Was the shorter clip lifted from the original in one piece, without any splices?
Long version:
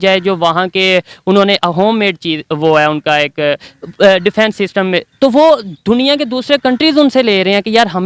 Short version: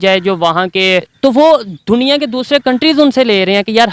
no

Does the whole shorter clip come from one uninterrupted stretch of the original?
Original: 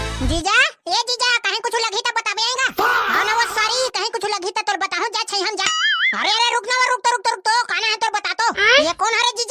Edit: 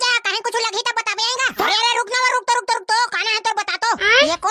no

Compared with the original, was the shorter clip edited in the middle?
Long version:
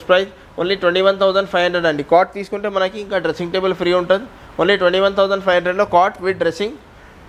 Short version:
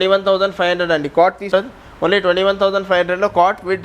yes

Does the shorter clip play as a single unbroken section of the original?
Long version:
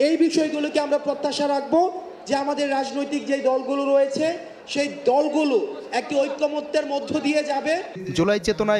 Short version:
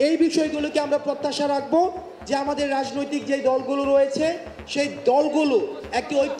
yes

